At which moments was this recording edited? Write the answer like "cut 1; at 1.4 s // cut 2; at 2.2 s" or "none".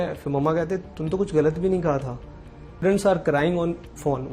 cut 1; at 2.8 s